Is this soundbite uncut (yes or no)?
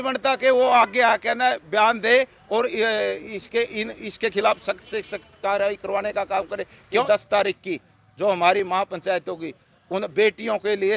no